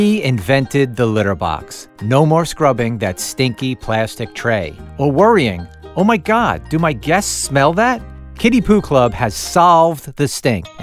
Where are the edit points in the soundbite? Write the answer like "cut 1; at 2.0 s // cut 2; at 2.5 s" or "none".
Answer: none